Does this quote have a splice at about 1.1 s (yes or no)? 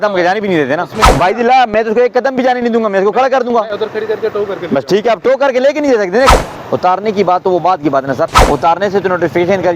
yes